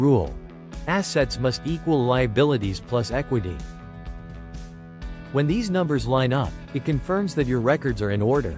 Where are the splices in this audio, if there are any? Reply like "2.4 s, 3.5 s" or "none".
none